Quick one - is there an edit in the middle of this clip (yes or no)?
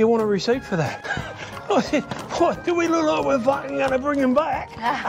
yes